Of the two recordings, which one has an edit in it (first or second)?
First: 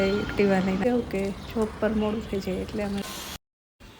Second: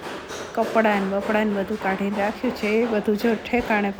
first